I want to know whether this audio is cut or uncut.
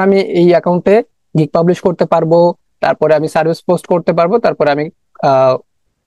uncut